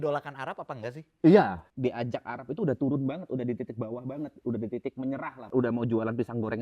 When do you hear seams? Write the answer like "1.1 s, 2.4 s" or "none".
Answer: 1.6 s, 5.5 s